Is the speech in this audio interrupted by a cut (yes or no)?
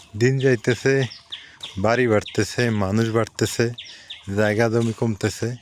no